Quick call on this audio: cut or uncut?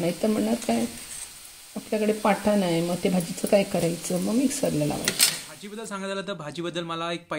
cut